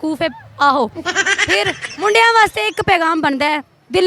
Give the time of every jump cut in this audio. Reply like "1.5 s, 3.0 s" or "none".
1.8 s